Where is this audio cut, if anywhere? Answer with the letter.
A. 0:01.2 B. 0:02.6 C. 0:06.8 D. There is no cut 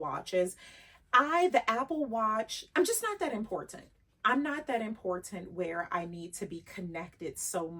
B